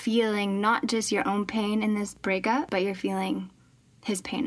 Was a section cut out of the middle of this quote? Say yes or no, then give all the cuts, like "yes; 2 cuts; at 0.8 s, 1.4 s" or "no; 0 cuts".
yes; 1 cut; at 2.3 s